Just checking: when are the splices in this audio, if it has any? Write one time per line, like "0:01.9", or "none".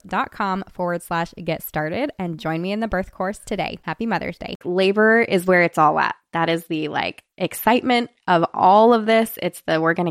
0:04.6